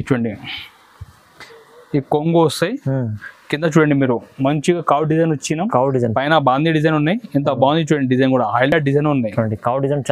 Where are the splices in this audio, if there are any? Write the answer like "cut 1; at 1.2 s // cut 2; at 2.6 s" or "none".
none